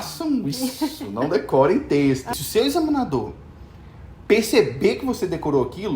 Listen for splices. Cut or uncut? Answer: cut